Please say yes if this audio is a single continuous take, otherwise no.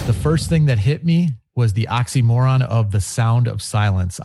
no